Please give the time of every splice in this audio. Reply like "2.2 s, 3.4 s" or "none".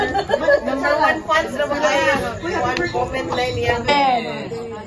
3.8 s